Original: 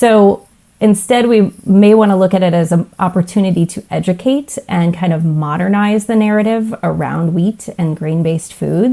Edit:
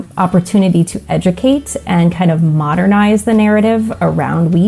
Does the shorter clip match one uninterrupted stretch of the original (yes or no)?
yes